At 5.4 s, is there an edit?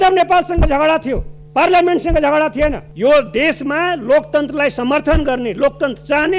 no; 1 cut; at 2.9 s

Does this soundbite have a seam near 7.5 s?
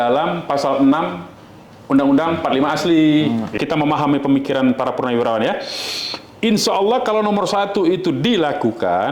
no; 1 cut; at 3.5 s

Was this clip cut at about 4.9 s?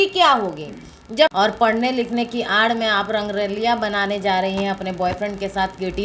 no; 1 cut; at 1.4 s

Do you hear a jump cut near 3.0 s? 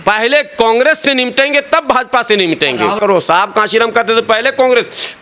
yes; 1 cut; at 3.0 s

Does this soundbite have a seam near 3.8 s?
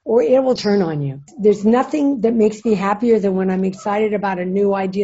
no; 1 cut; at 1.3 s

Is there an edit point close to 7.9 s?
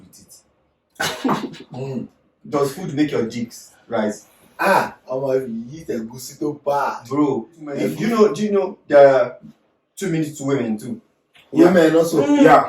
yes; 1 cut; at 7.9 s

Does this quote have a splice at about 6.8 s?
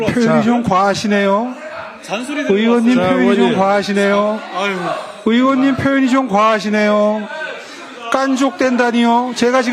no; 0 cuts

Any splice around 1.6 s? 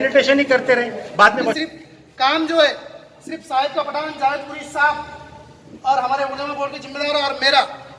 yes; 1 cut; at 1.6 s

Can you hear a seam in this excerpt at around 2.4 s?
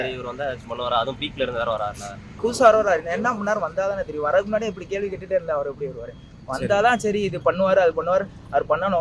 yes; 1 cut; at 2.4 s

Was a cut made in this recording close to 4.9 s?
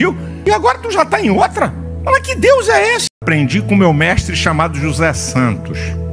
no; 1 cut; at 3.1 s

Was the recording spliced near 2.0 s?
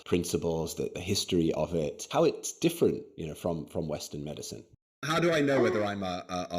yes; 3 cuts; at 1.0 s, 2.0 s, 4.7 s

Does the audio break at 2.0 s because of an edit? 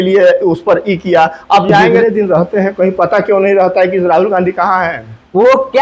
yes; 1 cut; at 2.0 s

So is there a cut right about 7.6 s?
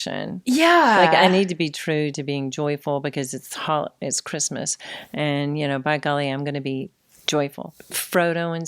yes; 1 cut; at 7.6 s

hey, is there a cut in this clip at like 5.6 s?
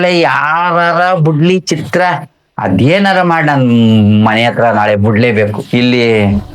no; 0 cuts

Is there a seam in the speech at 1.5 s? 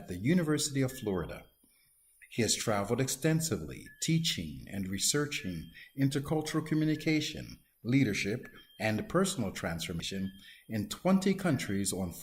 no; 1 cut; at 10.0 s

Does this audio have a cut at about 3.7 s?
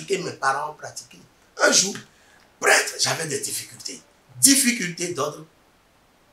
no; 1 cut; at 1.4 s

